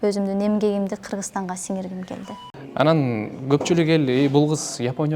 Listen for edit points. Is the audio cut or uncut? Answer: cut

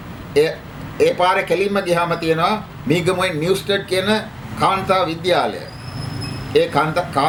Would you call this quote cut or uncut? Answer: uncut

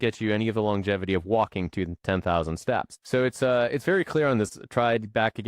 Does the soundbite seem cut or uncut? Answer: cut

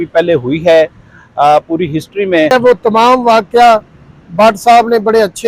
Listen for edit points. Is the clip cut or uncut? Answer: cut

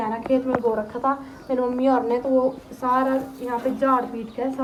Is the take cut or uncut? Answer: uncut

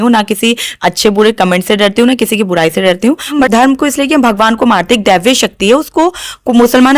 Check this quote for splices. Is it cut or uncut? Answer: cut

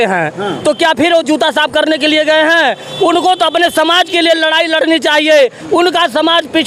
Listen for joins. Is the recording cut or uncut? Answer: uncut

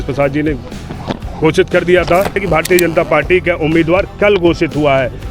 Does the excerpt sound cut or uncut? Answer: cut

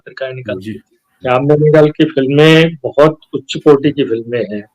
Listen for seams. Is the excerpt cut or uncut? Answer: cut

